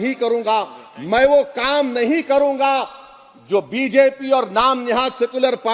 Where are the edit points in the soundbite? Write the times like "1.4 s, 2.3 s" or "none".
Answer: none